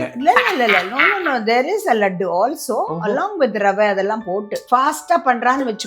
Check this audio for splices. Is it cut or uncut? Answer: cut